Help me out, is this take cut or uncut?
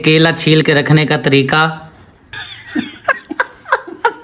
uncut